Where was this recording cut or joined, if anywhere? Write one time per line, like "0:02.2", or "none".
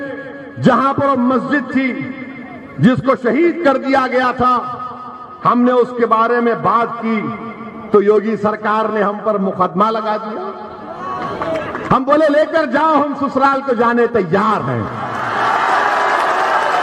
none